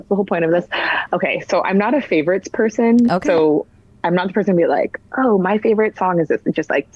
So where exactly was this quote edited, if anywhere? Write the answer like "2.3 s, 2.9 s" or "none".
1.0 s